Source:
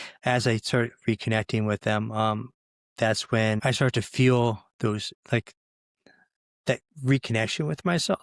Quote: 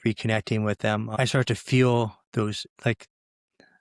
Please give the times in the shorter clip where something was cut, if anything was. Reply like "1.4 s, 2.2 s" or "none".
1.1 s